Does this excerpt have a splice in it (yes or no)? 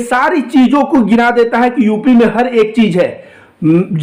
no